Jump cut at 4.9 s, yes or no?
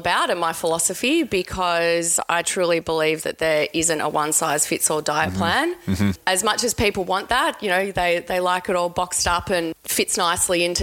no